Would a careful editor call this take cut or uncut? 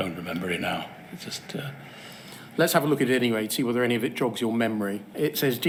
uncut